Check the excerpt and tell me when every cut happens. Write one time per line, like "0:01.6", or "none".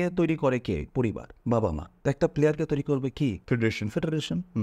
0:01.3
0:01.9
0:03.4